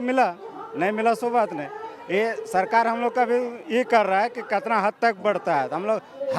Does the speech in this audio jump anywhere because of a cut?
no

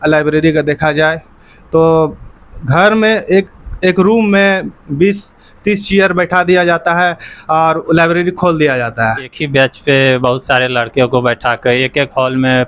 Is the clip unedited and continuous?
no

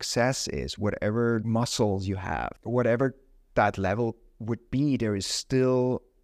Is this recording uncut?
no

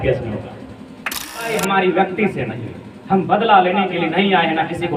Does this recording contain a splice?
yes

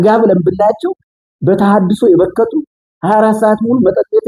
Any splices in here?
no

